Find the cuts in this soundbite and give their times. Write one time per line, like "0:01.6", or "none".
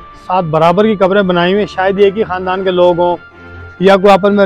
none